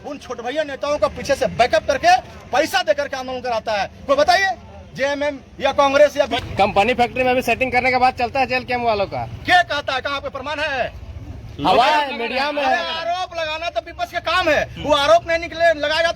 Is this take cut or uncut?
cut